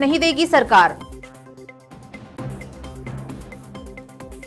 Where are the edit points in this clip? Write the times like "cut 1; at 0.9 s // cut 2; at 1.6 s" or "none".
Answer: none